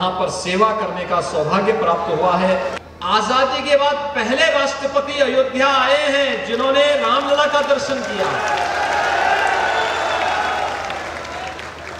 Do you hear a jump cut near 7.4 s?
no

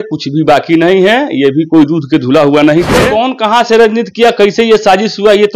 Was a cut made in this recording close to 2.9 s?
yes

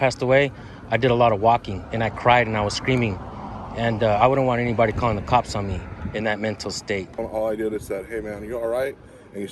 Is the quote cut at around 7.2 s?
yes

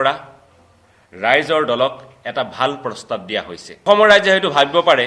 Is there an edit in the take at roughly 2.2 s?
no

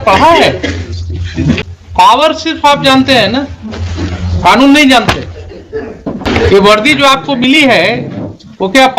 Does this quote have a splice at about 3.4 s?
no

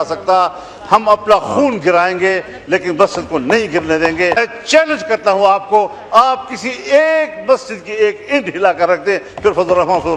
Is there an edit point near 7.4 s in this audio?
no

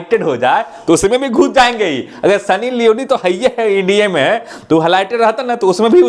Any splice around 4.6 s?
no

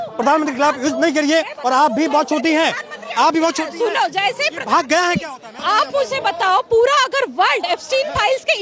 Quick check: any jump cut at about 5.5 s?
yes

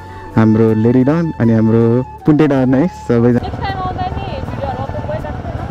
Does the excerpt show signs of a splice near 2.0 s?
no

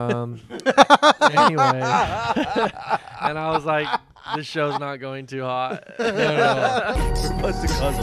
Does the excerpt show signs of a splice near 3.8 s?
no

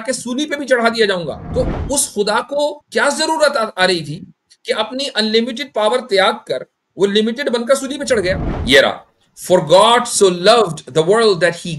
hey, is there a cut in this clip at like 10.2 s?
no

